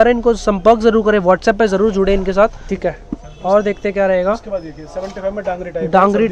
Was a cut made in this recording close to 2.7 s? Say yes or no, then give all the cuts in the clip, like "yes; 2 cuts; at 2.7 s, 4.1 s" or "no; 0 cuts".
yes; 1 cut; at 2.7 s